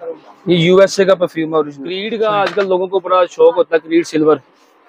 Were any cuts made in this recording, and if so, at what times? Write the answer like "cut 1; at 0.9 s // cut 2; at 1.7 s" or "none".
cut 1; at 2.0 s